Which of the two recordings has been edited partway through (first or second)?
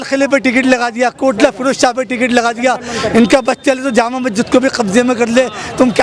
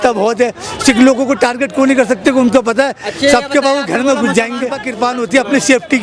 second